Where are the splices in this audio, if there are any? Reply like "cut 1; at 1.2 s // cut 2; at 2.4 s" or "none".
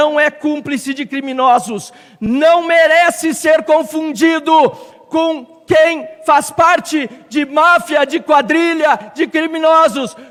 none

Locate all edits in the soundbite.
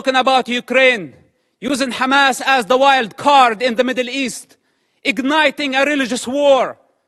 none

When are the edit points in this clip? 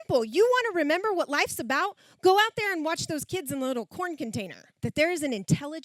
cut 1; at 4.6 s

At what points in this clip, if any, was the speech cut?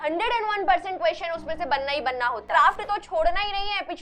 cut 1; at 2.4 s

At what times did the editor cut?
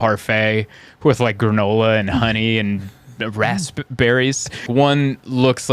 cut 1; at 4.7 s

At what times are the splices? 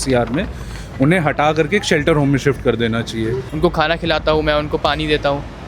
cut 1; at 3.4 s

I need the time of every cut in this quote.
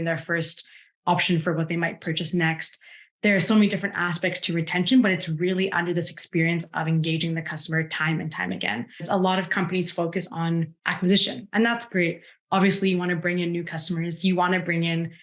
cut 1; at 9.0 s

